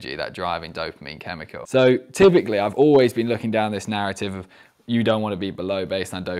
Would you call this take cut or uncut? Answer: cut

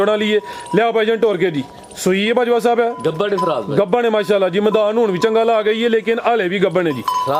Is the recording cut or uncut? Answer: uncut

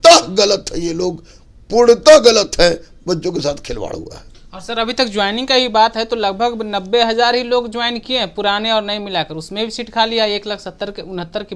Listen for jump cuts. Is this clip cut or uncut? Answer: uncut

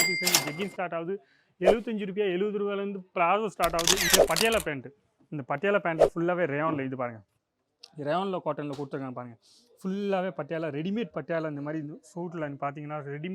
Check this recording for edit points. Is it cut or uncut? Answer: cut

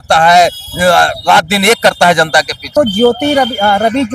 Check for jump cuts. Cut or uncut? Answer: cut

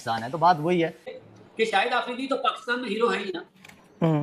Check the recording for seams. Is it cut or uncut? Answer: cut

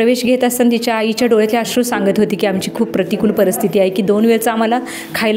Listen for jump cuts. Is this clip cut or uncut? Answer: uncut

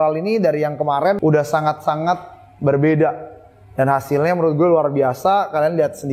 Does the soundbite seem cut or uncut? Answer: cut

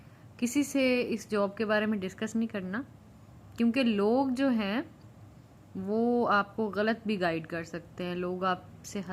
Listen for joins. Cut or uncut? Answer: uncut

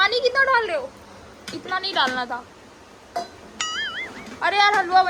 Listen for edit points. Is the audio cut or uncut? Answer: uncut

